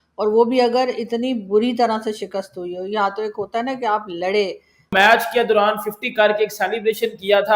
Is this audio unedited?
no; 1 cut; at 4.8 s

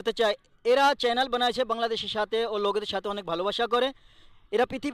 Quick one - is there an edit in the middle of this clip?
no; 0 cuts

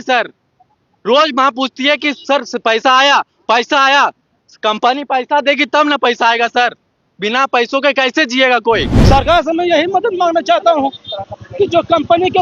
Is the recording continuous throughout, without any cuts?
no; 1 cut; at 8.9 s

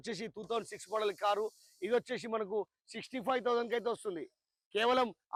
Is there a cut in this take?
no; 0 cuts

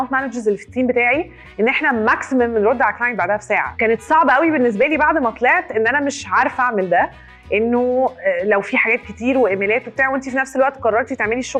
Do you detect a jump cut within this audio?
no; 0 cuts

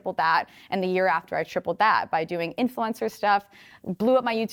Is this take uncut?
yes; 0 cuts

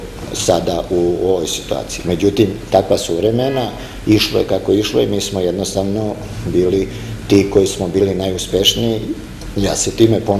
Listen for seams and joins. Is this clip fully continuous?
yes; 0 cuts

